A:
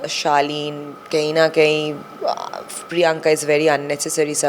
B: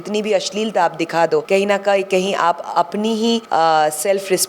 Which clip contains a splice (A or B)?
B